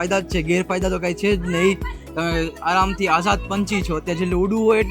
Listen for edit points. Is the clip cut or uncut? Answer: uncut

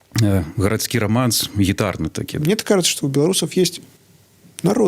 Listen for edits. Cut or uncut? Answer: cut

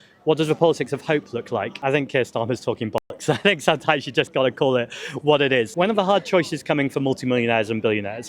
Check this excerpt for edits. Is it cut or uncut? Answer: cut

